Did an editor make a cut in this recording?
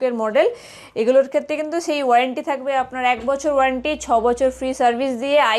no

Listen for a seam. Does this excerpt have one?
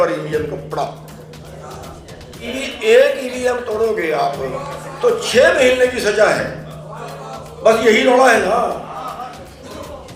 yes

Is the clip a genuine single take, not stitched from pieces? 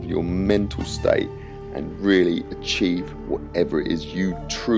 yes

